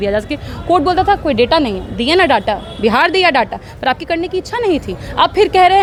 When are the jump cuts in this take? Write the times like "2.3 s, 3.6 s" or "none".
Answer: none